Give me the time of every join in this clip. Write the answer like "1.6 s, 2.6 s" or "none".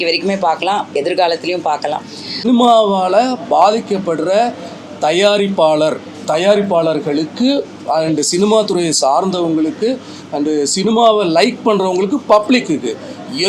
2.4 s